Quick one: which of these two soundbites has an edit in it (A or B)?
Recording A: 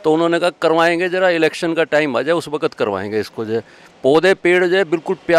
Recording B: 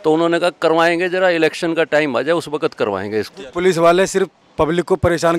B